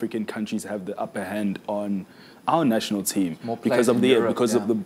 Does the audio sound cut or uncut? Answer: uncut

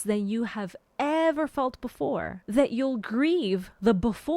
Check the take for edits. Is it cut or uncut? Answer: cut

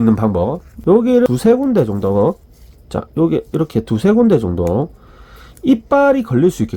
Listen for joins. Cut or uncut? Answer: cut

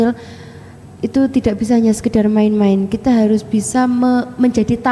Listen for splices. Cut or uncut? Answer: uncut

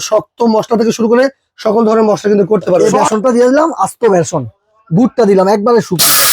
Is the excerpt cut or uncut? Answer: cut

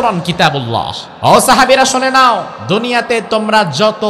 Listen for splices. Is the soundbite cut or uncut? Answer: cut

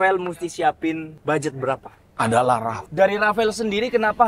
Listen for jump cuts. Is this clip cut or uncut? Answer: cut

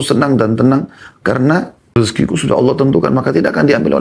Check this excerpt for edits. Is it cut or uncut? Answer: cut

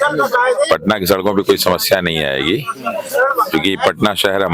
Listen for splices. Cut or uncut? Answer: uncut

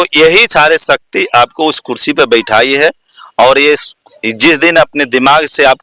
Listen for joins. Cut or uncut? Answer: uncut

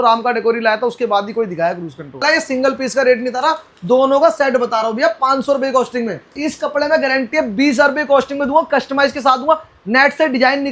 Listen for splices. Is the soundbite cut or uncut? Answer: cut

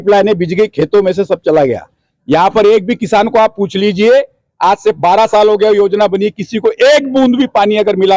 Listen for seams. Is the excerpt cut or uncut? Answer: uncut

